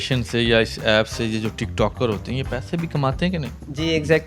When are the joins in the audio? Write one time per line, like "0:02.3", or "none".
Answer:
none